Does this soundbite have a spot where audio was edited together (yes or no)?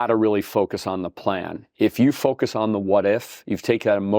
no